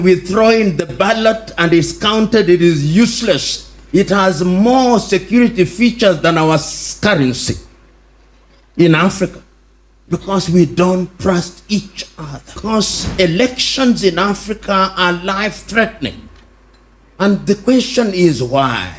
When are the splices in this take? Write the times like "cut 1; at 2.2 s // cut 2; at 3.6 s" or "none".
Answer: cut 1; at 12.6 s

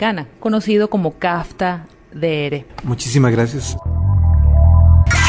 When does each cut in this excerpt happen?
cut 1; at 2.7 s // cut 2; at 3.7 s

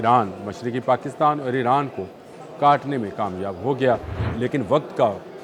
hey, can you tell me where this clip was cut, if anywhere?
cut 1; at 4.2 s

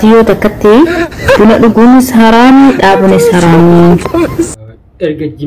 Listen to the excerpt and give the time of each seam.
cut 1; at 1.1 s

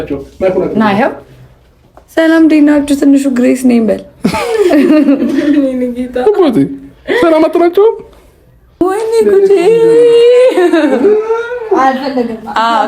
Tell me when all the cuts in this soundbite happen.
cut 1; at 8.8 s

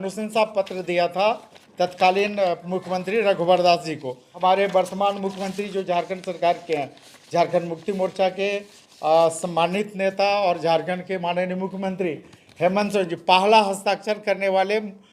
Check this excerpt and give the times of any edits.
cut 1; at 4.2 s

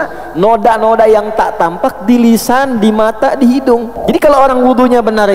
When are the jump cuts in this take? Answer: cut 1; at 3.9 s

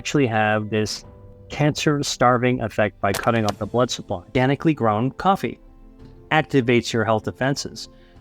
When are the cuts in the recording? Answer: cut 1; at 1.2 s // cut 2; at 4.3 s // cut 3; at 6.1 s

